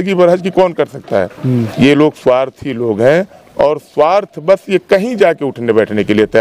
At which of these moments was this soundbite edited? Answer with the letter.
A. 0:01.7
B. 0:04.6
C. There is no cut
A